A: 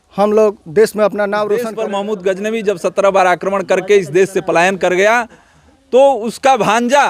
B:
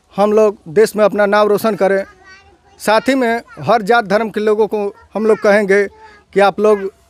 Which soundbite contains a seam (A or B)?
A